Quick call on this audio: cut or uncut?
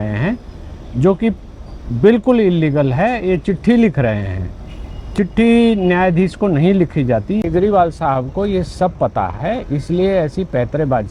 cut